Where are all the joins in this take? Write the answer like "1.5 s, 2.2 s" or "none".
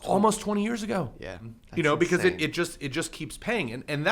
1.6 s

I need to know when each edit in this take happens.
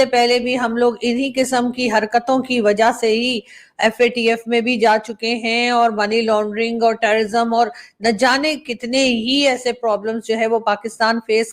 none

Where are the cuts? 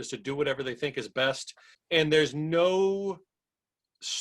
1.7 s

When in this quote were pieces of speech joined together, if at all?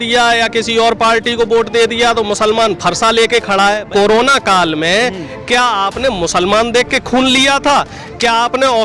3.9 s

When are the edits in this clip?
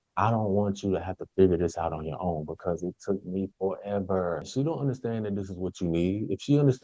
4.5 s

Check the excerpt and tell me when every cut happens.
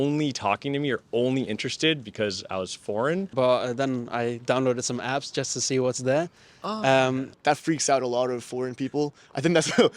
3.3 s, 7.3 s

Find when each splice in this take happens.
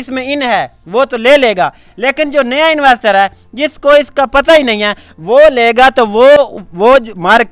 none

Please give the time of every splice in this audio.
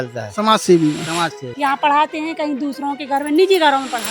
1.4 s

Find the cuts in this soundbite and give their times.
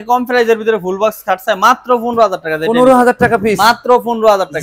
none

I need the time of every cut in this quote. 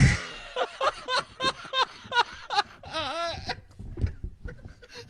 4.2 s

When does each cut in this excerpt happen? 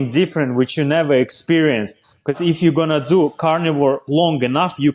2.3 s, 4.0 s

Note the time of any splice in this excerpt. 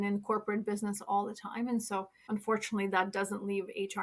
2.2 s

